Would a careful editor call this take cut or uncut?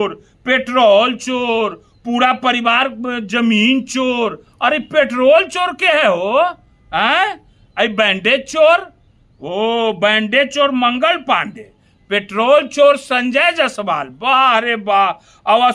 uncut